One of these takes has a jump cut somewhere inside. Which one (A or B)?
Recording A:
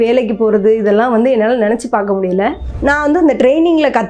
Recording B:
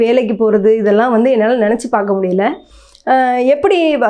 A